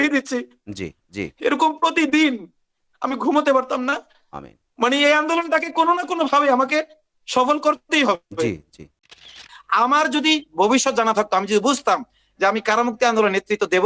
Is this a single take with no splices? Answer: no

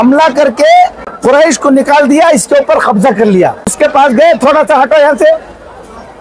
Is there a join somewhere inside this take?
yes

